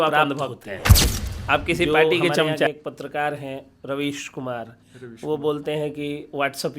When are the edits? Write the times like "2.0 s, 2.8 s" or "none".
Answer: 2.7 s